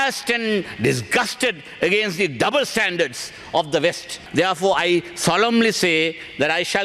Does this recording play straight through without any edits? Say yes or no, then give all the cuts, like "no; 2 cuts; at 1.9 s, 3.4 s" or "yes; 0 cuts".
no; 1 cut; at 4.1 s